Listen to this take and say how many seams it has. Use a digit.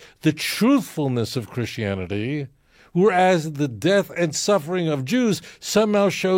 0